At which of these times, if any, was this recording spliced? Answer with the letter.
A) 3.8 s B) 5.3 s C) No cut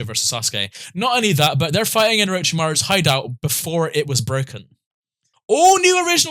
B